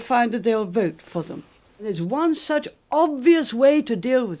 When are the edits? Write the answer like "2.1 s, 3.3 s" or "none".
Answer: 1.9 s